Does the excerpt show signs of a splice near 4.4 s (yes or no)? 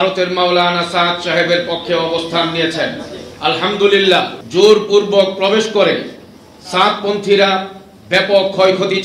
yes